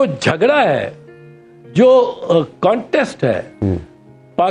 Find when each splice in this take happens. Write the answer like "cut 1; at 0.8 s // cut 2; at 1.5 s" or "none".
none